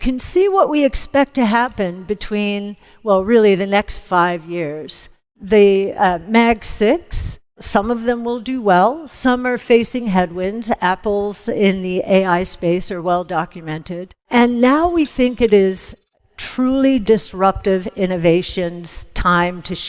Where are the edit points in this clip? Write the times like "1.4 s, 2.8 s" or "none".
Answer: none